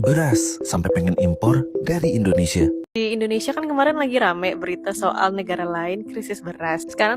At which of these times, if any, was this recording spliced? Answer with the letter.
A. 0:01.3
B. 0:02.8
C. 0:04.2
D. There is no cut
B